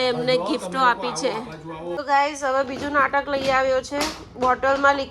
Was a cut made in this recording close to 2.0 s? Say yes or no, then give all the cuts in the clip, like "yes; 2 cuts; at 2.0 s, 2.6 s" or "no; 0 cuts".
yes; 1 cut; at 2.0 s